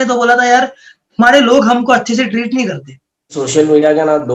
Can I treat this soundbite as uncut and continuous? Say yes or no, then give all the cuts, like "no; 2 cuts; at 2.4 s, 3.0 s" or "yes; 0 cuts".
no; 1 cut; at 3.4 s